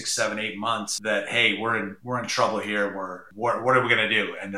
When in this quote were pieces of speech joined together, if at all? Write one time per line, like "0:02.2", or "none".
0:00.9
0:02.0
0:03.2